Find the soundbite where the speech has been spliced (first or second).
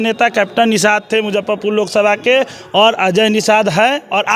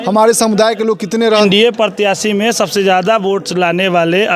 second